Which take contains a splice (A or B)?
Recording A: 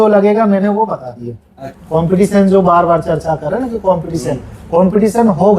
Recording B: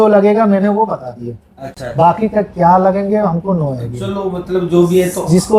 A